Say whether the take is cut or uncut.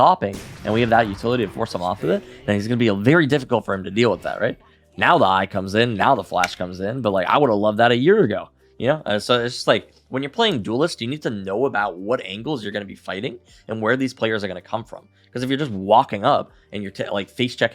uncut